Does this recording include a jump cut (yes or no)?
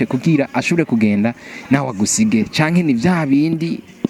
no